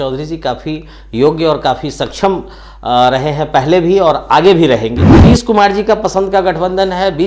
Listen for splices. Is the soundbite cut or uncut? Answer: cut